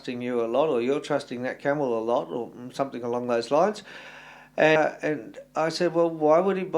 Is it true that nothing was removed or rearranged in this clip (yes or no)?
no